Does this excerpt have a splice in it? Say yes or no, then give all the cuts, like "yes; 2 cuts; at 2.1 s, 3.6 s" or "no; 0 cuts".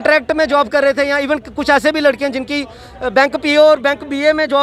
no; 0 cuts